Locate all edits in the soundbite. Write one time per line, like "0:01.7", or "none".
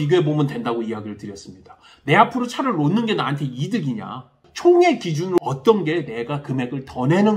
0:04.4
0:05.4